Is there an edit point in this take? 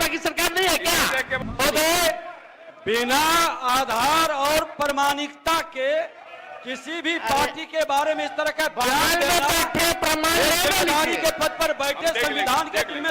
yes; 1 cut; at 1.4 s

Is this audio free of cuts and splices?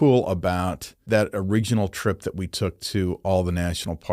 no; 1 cut; at 1.0 s

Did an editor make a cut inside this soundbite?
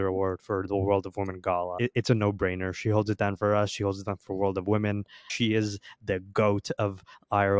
yes; 2 cuts; at 1.8 s, 5.3 s

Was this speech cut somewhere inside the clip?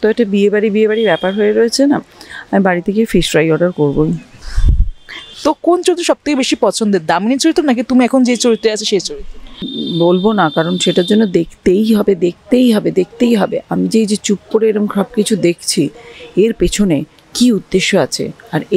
yes; 2 cuts; at 5.2 s, 9.7 s

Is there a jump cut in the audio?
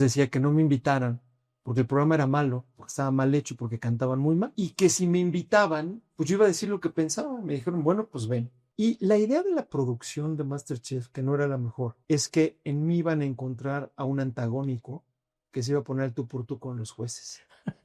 yes; 3 cuts; at 4.5 s, 8.6 s, 12.0 s

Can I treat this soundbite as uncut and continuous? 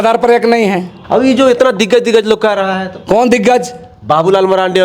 no; 1 cut; at 0.9 s

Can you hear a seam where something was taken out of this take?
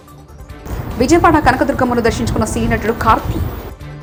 no; 0 cuts

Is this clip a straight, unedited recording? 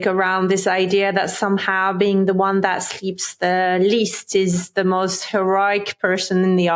yes; 0 cuts

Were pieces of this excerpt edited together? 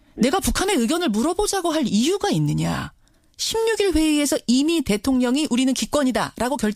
yes; 1 cut; at 5.6 s

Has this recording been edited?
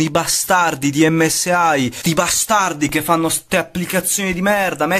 no; 0 cuts

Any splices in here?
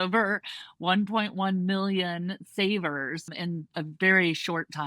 yes; 1 cut; at 3.3 s

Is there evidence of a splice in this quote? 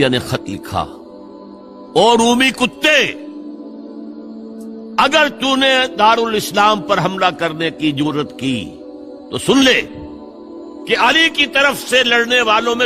no; 0 cuts

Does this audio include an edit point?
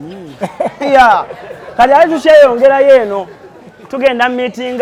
no; 0 cuts

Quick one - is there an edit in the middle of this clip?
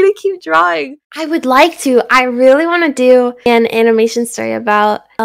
yes; 1 cut; at 0.9 s

